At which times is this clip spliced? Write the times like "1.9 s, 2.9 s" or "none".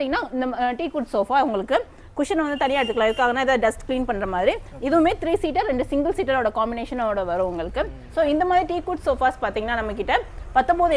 8.0 s

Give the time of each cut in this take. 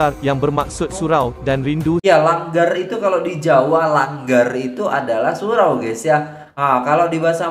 2.0 s

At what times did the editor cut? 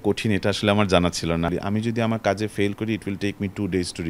1.5 s

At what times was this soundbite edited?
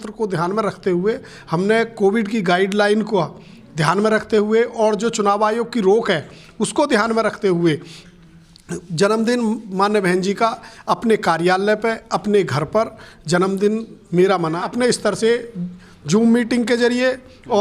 14.6 s

